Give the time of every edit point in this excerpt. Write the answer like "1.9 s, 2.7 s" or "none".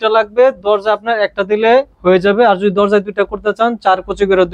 none